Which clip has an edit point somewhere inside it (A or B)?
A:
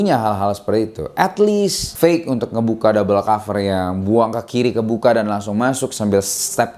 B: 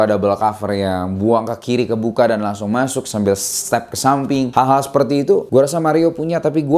A